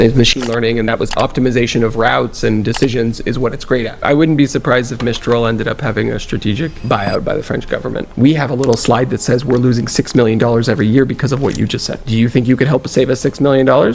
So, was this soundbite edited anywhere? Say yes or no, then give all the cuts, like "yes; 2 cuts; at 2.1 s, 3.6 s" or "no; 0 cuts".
yes; 2 cuts; at 4.0 s, 8.1 s